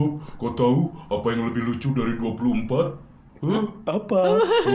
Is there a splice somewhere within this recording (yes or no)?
no